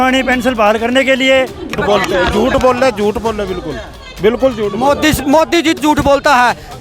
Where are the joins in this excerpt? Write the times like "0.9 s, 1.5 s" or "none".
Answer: 1.8 s, 5.8 s